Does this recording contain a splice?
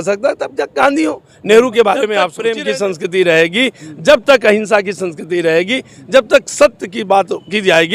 yes; 1 cut; at 2.3 s

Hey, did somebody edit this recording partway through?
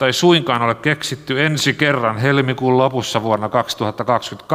no; 0 cuts

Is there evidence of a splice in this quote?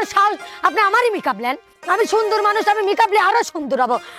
yes; 1 cut; at 1.7 s

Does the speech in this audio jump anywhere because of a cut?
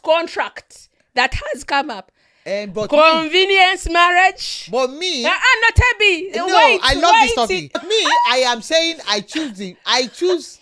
yes; 1 cut; at 7.8 s

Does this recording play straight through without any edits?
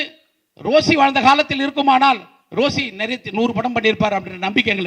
yes; 0 cuts

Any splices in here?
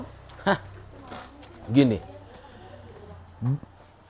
no; 0 cuts

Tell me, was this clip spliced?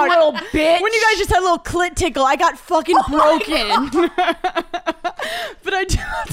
no; 0 cuts

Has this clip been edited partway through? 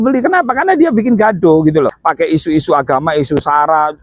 yes; 1 cut; at 2.0 s

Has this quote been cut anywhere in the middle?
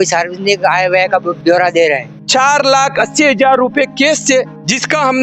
yes; 1 cut; at 2.1 s

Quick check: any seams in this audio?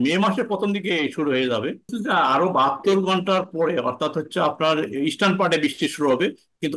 yes; 1 cut; at 2.0 s

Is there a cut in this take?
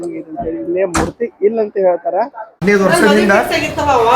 yes; 1 cut; at 2.5 s

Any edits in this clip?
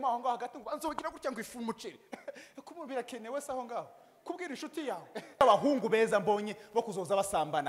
yes; 1 cut; at 5.4 s

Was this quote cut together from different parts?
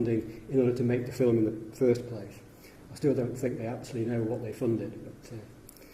yes; 1 cut; at 2.3 s

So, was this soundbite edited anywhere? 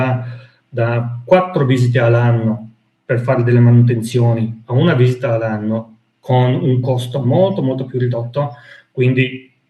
no; 0 cuts

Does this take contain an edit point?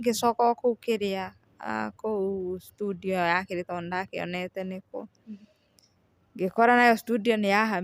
no; 0 cuts

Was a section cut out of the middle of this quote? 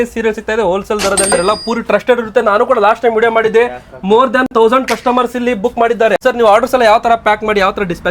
yes; 1 cut; at 1.3 s

